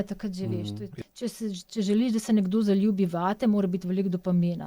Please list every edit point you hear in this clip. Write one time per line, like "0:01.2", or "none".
0:00.9